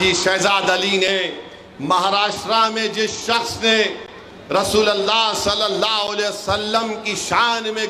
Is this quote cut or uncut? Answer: uncut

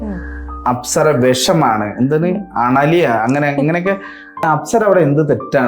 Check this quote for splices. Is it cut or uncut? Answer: cut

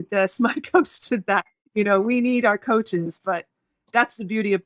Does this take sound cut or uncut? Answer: uncut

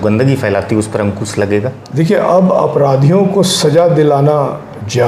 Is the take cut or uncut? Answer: cut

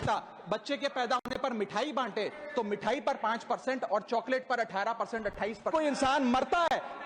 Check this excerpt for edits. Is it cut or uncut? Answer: cut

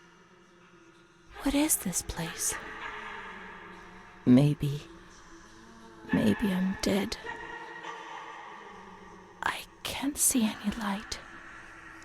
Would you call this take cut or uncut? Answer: cut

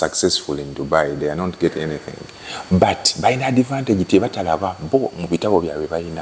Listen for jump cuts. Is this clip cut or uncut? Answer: uncut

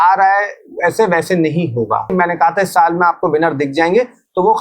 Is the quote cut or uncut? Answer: cut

